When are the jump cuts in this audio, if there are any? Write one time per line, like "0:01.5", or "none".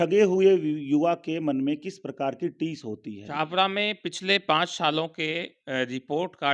0:03.2